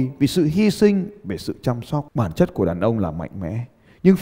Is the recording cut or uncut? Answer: cut